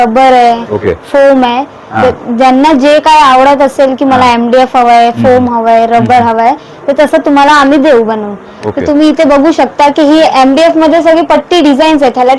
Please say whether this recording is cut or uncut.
uncut